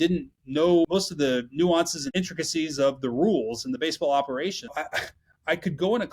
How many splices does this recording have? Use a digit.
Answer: 3